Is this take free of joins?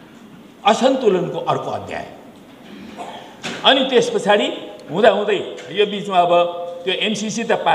yes; 0 cuts

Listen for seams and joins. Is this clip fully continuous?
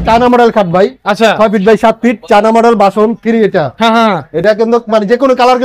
yes; 0 cuts

